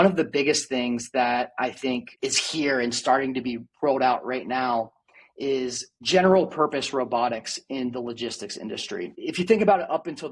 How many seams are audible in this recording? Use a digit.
1